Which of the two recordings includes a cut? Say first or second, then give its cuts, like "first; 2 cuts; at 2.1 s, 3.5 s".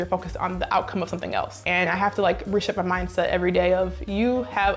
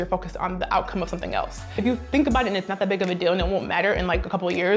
second; 1 cut; at 1.7 s